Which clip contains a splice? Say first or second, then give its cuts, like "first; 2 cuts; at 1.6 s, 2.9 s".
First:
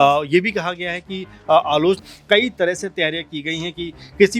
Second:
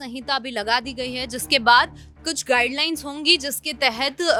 first; 1 cut; at 2.0 s